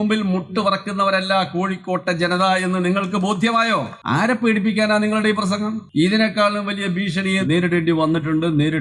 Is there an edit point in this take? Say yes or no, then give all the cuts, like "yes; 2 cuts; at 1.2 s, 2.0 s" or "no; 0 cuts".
yes; 3 cuts; at 3.9 s, 5.8 s, 7.4 s